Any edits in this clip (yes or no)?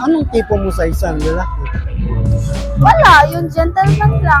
no